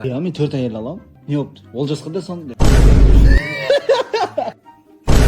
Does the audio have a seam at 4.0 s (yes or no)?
no